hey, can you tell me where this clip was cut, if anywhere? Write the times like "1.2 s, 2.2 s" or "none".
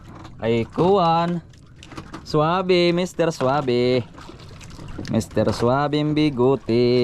none